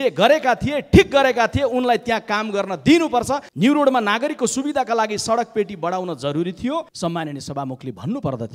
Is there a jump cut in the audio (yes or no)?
yes